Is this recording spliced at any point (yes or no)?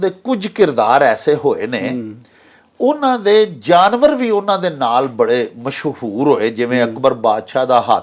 no